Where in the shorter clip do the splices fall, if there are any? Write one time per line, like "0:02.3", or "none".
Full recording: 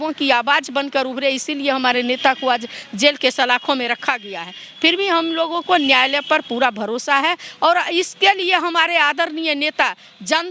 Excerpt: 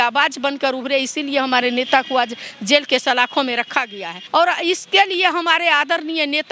0:04.2